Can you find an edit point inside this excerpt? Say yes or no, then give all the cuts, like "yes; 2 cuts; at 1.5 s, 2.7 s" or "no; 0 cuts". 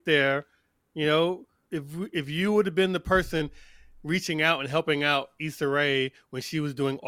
yes; 1 cut; at 1.5 s